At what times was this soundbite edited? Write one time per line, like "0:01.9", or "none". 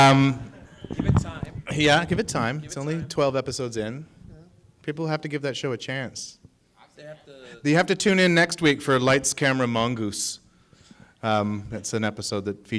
0:03.8